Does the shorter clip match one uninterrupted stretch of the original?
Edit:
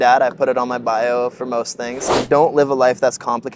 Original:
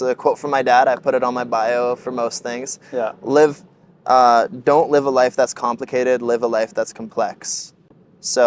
no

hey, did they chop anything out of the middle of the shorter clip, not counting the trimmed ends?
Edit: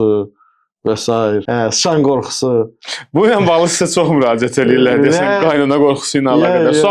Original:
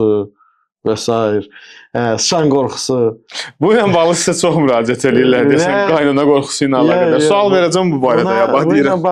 yes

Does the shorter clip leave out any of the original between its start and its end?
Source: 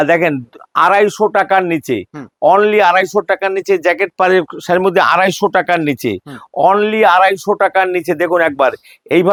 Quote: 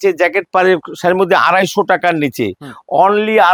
no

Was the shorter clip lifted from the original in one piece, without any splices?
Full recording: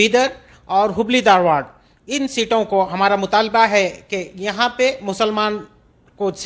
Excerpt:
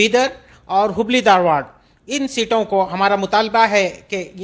yes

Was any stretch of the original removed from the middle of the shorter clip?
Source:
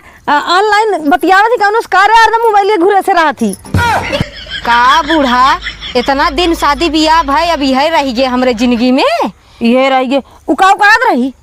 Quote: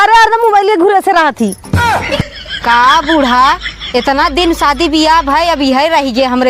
no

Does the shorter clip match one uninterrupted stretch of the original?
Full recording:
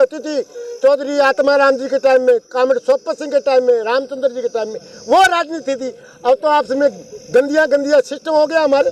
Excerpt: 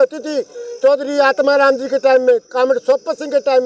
yes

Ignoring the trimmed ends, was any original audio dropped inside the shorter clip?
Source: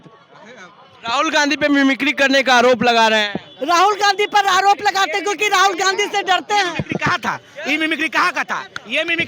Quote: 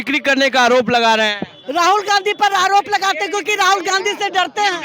no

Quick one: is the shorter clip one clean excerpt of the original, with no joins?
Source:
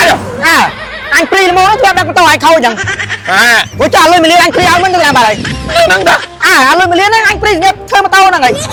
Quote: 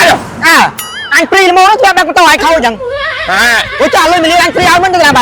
yes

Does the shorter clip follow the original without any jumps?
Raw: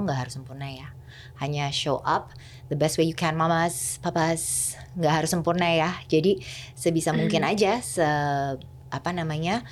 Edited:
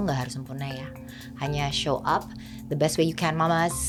yes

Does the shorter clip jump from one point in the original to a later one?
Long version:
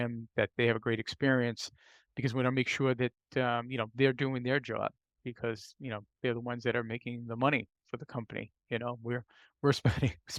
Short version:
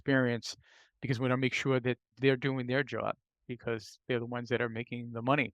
yes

